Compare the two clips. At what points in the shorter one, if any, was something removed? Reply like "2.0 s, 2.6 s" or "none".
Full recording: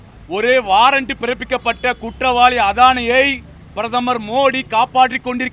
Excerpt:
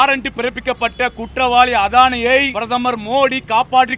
2.6 s